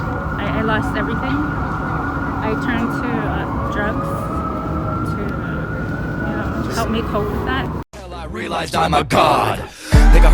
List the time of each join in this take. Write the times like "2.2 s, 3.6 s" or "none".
7.9 s